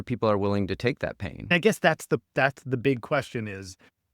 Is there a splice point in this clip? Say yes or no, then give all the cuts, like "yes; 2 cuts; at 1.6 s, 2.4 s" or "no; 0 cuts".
yes; 1 cut; at 1.5 s